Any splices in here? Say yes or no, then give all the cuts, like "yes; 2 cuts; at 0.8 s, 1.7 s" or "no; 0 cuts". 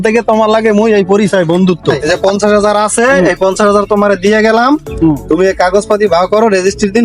yes; 1 cut; at 2.0 s